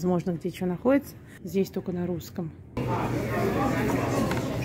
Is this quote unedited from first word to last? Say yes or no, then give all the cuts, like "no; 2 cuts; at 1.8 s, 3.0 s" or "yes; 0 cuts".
no; 1 cut; at 2.8 s